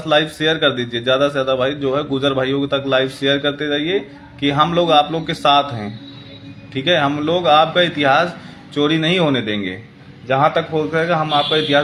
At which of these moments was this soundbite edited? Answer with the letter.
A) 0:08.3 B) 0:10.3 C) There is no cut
C